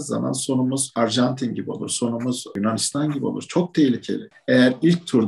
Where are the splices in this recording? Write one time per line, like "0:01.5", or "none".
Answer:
0:00.9
0:02.5
0:04.3

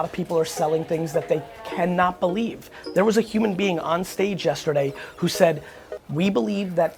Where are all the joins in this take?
none

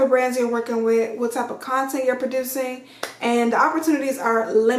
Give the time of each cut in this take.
none

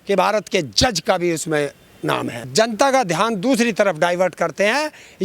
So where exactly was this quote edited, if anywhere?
0:02.4

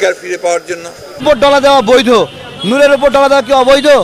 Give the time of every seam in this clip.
0:01.2

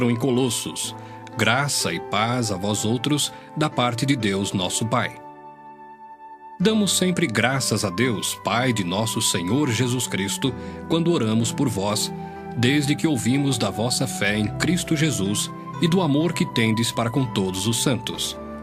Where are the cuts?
0:04.8

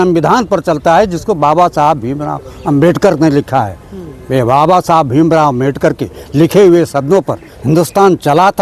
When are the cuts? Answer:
none

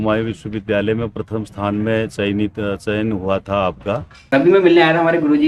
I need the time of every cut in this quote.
0:04.3

